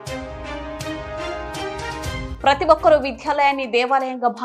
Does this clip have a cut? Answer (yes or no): yes